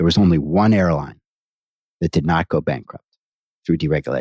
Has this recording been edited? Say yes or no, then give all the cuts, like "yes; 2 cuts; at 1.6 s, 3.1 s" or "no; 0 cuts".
no; 0 cuts